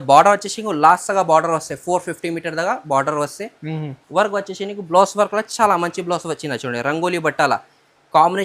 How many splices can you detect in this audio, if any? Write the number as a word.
zero